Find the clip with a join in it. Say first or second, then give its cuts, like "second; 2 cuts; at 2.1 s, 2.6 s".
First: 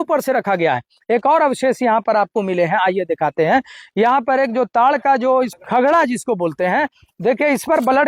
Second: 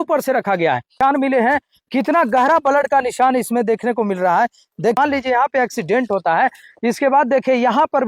second; 2 cuts; at 0.9 s, 5.0 s